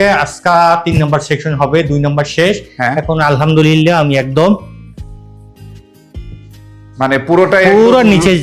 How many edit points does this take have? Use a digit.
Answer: 0